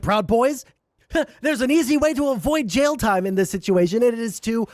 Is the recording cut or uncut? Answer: uncut